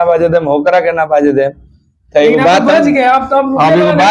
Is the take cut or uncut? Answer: uncut